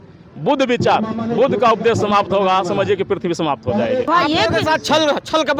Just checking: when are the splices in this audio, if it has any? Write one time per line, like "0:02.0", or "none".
0:04.1